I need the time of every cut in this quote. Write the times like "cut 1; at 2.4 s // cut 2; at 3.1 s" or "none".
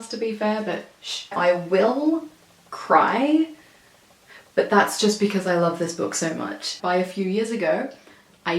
cut 1; at 1.3 s // cut 2; at 6.7 s